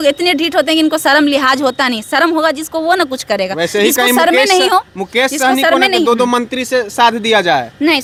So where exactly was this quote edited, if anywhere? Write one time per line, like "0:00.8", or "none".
none